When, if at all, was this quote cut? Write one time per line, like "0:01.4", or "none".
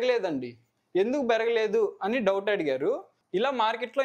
0:03.1